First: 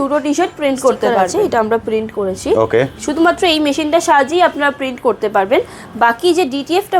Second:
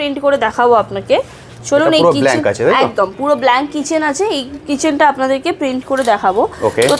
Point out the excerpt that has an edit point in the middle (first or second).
first